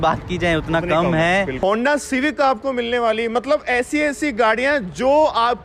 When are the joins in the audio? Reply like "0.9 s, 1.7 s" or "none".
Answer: 1.6 s